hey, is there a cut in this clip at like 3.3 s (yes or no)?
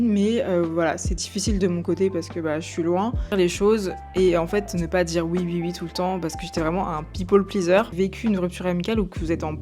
yes